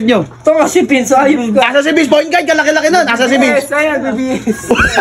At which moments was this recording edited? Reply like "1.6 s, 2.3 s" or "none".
none